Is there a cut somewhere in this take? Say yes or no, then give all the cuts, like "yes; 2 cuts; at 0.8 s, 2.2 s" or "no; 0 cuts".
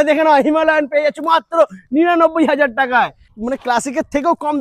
yes; 1 cut; at 3.2 s